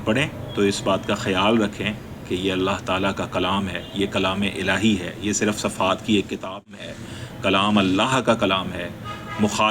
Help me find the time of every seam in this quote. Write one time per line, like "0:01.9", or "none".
0:06.7